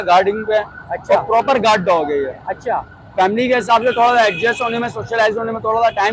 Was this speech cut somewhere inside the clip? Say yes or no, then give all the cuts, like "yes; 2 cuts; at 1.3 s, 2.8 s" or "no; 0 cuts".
no; 0 cuts